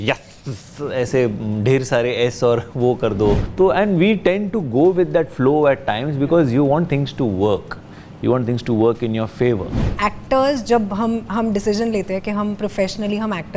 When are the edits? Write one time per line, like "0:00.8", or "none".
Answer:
0:03.5
0:09.9